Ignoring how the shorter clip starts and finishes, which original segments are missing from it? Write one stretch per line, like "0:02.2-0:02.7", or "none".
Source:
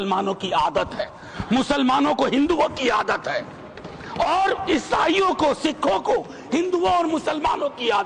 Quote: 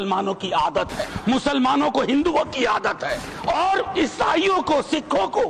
0:01.1-0:01.3
0:03.5-0:04.0